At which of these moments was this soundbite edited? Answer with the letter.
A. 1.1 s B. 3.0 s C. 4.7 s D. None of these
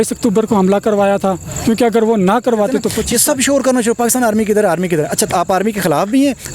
B